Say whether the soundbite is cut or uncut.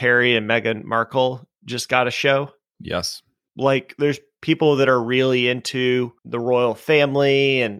cut